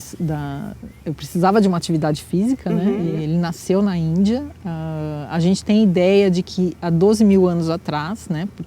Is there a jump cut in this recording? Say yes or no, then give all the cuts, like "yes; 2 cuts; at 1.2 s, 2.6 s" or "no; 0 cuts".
yes; 1 cut; at 3.2 s